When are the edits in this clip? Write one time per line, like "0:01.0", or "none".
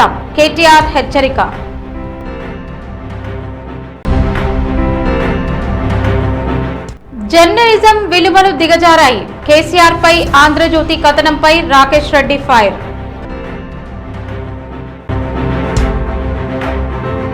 0:14.9